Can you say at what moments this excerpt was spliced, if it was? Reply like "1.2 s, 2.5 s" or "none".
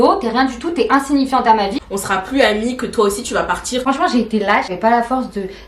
1.8 s, 3.8 s, 4.7 s